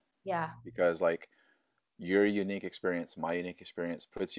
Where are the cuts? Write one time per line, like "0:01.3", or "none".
none

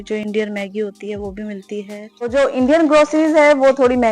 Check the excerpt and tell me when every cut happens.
0:02.0

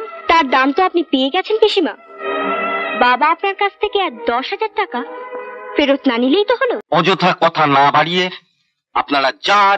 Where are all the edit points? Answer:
0:06.8

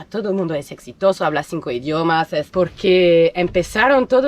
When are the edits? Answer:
0:02.5

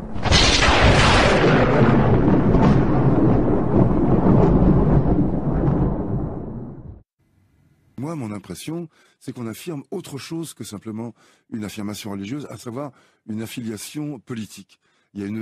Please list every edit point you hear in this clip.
none

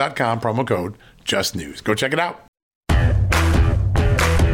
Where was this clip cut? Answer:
0:02.9

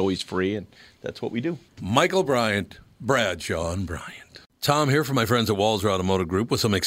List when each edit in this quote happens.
0:04.5

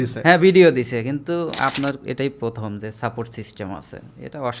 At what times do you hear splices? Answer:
none

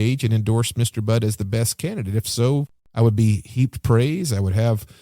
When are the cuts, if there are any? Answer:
0:02.8

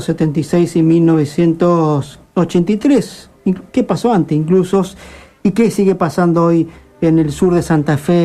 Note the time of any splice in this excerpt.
0:04.9

